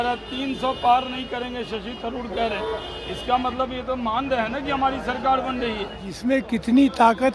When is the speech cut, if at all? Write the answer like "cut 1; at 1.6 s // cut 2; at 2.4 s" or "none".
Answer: cut 1; at 6.2 s